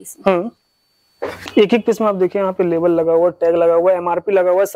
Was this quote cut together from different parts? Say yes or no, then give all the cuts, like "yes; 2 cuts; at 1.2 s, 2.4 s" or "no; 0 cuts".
yes; 1 cut; at 1.5 s